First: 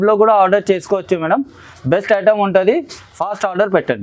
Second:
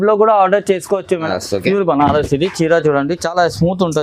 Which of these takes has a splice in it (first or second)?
second